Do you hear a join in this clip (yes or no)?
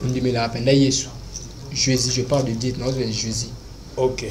no